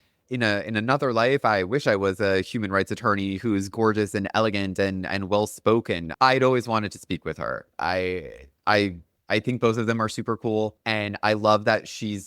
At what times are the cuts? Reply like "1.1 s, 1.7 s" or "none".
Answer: 9.1 s, 10.8 s